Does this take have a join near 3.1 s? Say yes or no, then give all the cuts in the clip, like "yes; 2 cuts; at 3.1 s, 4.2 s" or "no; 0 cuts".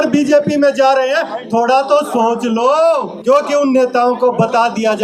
yes; 1 cut; at 3.1 s